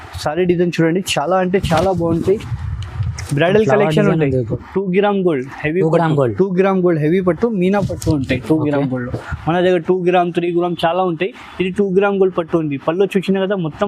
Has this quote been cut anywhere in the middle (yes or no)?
yes